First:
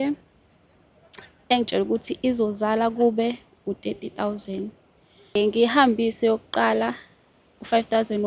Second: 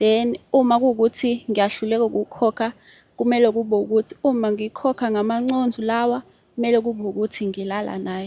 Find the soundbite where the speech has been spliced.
first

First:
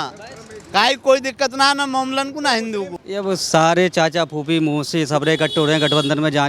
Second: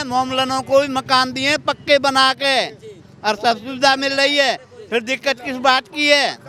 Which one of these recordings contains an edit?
first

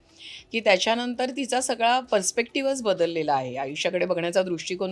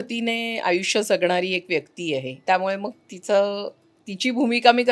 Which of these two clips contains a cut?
second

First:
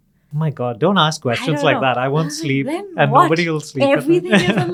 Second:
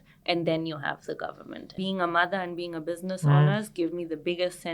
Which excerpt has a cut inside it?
second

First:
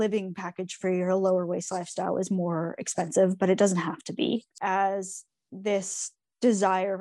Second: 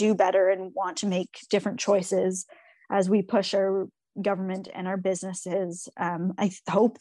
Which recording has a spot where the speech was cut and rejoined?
first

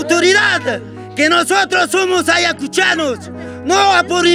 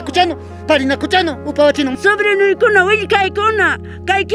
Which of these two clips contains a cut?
second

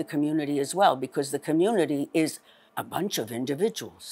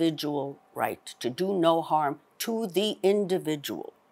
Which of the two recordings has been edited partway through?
first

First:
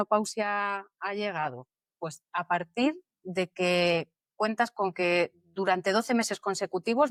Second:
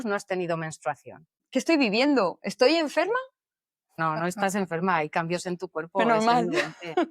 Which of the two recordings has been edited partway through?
second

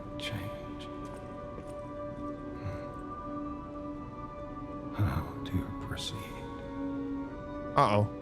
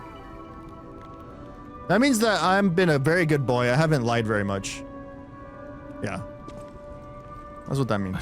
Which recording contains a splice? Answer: first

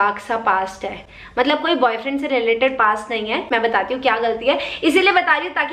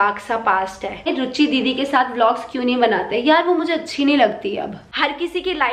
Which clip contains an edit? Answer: second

